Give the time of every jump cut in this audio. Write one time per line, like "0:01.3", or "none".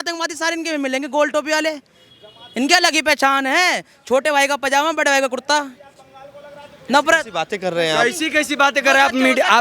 none